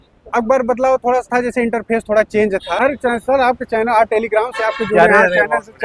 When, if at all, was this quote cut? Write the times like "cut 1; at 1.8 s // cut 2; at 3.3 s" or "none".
cut 1; at 2.8 s